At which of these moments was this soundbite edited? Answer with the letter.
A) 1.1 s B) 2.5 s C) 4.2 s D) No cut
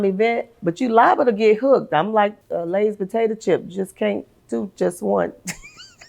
B